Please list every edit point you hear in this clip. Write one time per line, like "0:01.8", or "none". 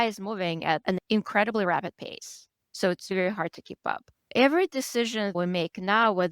0:00.9

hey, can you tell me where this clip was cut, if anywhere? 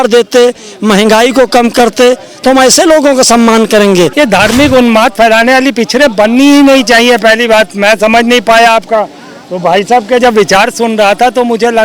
0:04.1

